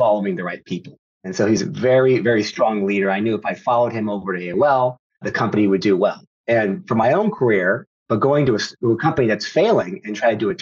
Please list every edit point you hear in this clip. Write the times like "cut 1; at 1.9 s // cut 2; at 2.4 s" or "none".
cut 1; at 5.3 s // cut 2; at 7.9 s